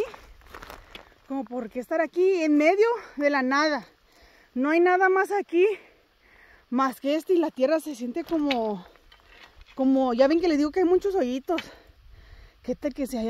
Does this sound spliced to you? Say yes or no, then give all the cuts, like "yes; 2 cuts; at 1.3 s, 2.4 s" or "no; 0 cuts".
no; 0 cuts